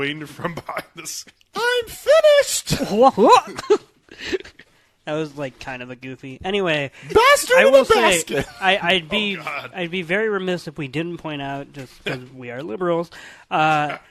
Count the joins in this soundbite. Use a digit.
0